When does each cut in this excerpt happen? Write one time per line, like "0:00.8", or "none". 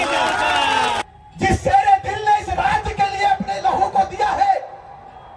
0:01.0